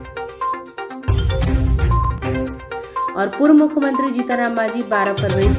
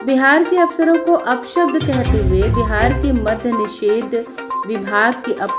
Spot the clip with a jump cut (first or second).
first